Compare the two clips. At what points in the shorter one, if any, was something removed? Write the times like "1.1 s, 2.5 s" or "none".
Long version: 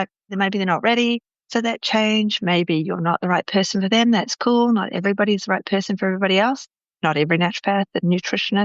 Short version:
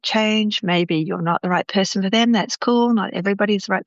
none

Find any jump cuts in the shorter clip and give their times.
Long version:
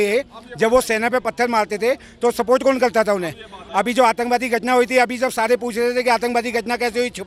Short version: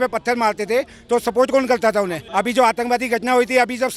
2.2 s

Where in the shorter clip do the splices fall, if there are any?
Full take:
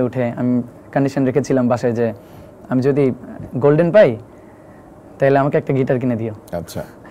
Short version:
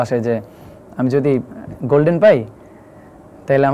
none

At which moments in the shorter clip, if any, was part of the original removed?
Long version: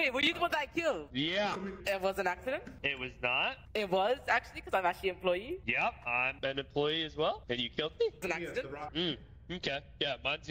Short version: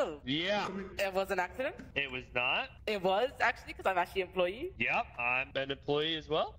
none

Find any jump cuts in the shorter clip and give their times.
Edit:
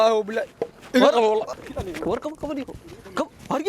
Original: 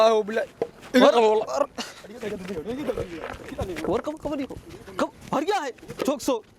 1.5 s

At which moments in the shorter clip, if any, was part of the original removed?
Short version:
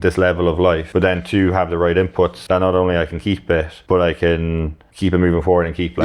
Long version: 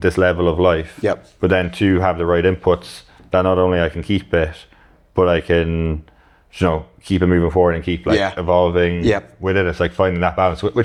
0.8 s, 2.4 s, 3.7 s, 4.8 s

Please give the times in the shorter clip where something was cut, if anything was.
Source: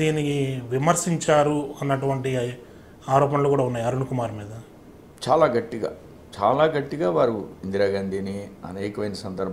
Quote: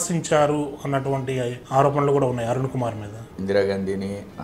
1.6 s, 3.3 s

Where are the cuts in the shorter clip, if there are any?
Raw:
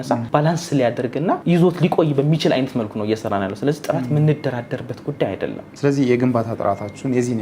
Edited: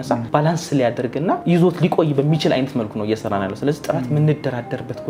none

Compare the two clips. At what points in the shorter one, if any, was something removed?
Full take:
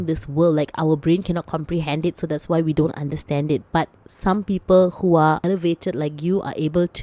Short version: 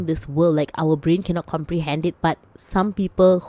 2.2 s

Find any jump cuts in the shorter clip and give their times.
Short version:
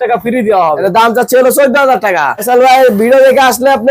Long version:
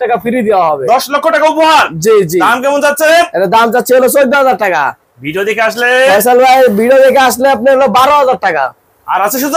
0.8 s, 2.4 s

